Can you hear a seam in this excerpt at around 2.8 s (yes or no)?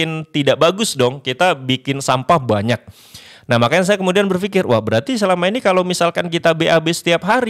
no